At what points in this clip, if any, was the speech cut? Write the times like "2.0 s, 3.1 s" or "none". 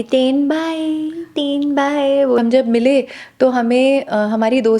2.4 s